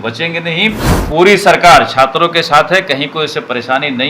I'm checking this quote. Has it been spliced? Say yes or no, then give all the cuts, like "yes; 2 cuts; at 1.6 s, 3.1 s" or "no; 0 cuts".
yes; 1 cut; at 0.9 s